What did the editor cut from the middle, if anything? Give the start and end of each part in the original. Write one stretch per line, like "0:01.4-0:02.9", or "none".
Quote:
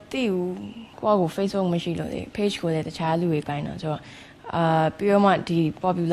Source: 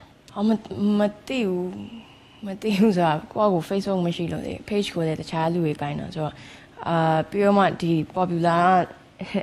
0:02.1-0:03.3